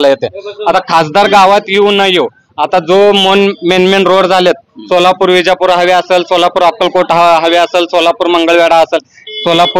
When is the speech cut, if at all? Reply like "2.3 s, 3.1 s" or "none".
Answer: none